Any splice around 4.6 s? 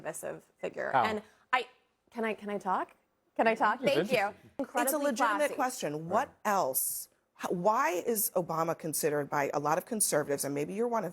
yes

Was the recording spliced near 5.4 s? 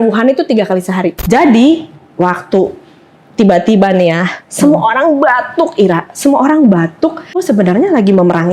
no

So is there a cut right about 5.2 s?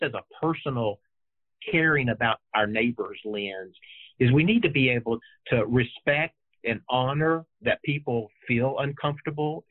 yes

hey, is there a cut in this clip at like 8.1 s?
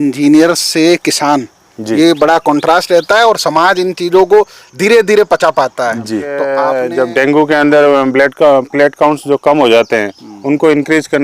no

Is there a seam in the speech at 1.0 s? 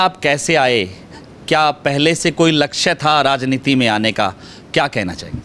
no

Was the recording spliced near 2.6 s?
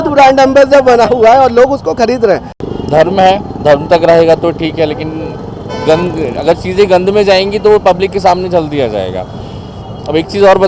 yes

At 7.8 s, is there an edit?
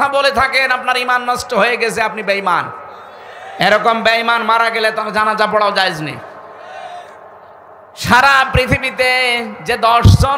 yes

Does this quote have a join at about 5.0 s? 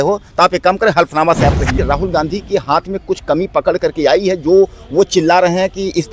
no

